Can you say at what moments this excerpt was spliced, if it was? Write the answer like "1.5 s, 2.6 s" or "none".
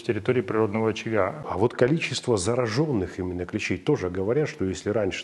1.5 s